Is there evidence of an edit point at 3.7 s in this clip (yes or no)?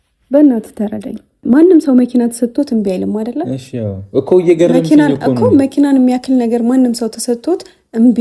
no